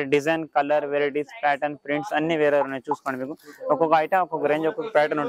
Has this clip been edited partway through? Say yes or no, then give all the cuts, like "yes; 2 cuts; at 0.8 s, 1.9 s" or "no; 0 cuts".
no; 0 cuts